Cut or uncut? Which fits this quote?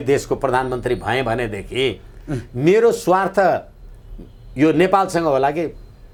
uncut